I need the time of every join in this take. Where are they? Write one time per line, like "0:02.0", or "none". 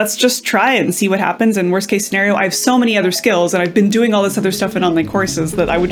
none